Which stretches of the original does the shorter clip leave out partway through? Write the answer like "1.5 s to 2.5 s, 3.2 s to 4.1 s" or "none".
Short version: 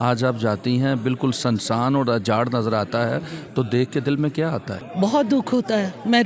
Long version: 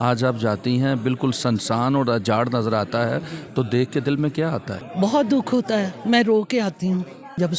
none

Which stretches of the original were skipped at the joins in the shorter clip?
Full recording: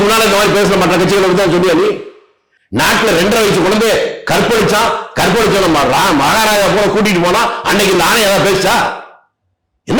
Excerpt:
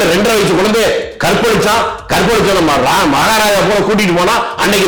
none

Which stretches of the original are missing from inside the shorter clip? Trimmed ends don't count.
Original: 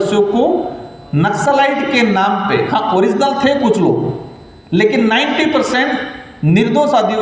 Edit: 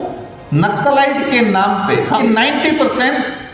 2.8 s to 4.9 s

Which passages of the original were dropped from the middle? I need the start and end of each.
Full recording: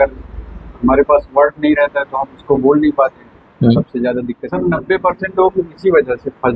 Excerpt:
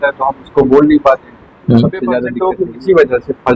4.3 s to 5.3 s

